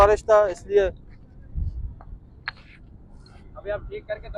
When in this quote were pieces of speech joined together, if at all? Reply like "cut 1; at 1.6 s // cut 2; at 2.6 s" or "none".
none